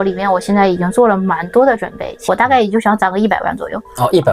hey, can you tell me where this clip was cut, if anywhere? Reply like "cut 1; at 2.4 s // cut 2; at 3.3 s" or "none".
cut 1; at 2.1 s